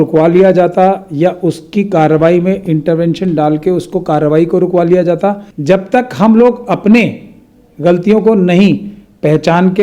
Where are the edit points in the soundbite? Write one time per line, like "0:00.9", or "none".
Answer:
0:05.5